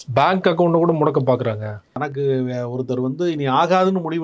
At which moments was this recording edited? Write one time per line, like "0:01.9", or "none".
0:02.0